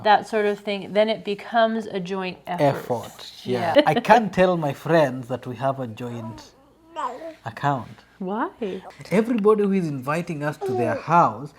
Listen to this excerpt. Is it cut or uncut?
cut